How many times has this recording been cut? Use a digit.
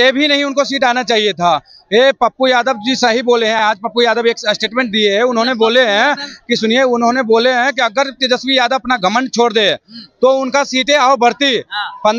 0